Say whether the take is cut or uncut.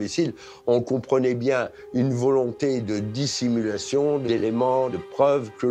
cut